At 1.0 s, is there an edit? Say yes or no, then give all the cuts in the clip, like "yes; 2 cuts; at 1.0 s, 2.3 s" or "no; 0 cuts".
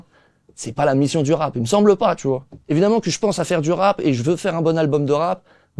no; 1 cut; at 2.5 s